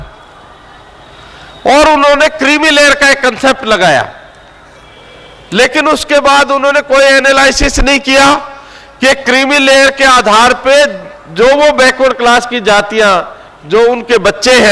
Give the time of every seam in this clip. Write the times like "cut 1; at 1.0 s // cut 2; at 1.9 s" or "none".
none